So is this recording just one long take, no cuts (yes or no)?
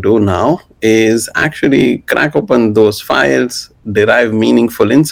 yes